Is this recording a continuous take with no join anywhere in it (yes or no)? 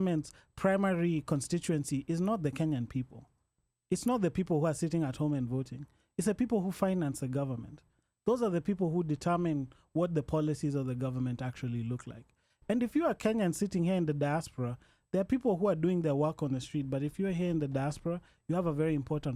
yes